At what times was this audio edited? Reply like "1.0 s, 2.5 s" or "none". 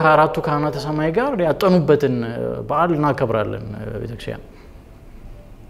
none